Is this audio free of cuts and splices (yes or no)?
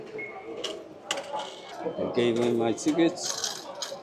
no